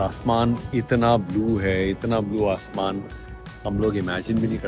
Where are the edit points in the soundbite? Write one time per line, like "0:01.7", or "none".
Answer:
none